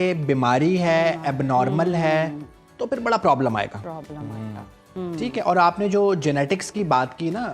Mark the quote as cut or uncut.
uncut